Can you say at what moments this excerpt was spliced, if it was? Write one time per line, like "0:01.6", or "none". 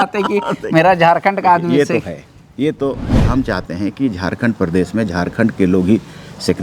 0:03.2